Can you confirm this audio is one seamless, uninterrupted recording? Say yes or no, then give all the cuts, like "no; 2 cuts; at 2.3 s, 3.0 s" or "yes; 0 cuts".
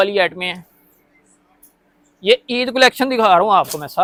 yes; 0 cuts